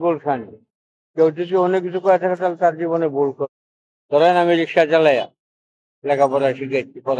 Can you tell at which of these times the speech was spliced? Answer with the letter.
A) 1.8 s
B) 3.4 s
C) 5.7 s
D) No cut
B